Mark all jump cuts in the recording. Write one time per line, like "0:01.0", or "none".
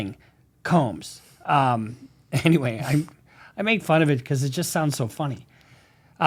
none